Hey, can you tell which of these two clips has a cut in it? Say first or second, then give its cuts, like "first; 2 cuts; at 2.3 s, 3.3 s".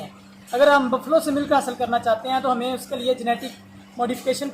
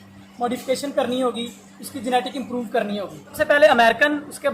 second; 1 cut; at 3.3 s